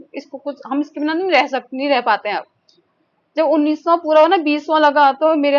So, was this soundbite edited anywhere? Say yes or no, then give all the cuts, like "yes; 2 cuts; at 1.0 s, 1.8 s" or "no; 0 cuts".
no; 0 cuts